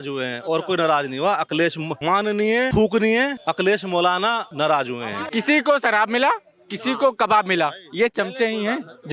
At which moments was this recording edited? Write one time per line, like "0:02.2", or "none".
0:02.2
0:03.4
0:04.5
0:05.1